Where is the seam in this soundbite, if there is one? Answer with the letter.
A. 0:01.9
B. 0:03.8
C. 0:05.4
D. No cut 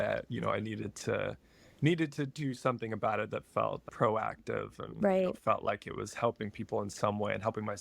B